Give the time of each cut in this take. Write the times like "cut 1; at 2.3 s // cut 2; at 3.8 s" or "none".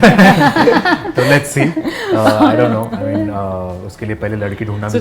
none

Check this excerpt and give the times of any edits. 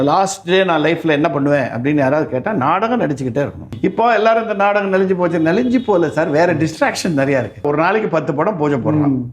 cut 1; at 3.7 s // cut 2; at 7.6 s

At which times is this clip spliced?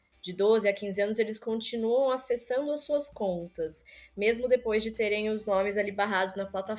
none

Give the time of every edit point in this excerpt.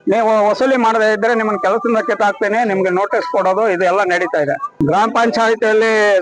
cut 1; at 4.7 s

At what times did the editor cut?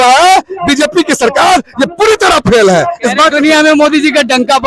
none

